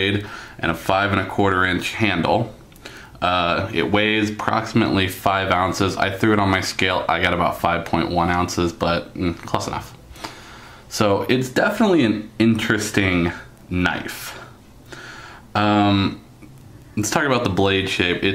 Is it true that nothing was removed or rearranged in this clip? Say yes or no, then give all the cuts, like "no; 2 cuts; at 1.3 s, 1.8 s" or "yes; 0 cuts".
no; 1 cut; at 12.3 s